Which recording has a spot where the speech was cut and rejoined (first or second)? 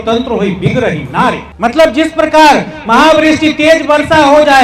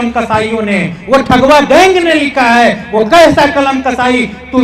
first